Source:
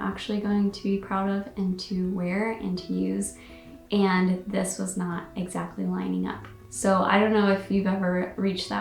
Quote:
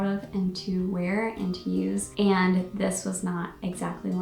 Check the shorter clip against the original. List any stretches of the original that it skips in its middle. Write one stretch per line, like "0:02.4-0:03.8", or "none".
0:03.3-0:03.8